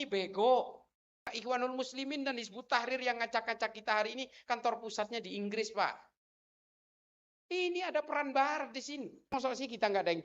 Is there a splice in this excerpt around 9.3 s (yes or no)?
yes